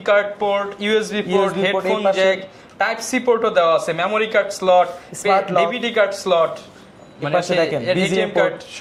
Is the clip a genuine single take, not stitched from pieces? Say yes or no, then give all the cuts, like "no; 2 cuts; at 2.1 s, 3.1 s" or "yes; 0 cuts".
yes; 0 cuts